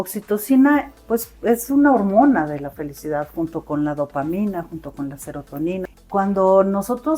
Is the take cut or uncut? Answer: cut